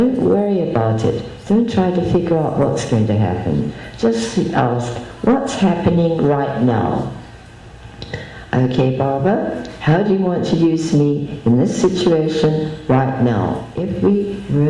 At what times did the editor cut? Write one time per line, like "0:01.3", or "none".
0:13.8

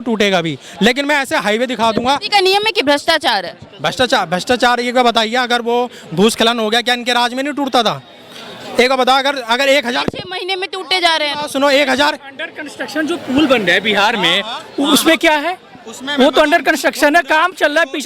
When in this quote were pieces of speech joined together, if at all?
none

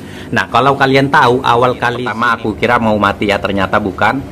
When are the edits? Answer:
0:02.1

